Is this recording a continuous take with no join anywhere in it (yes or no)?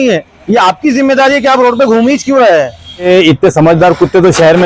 no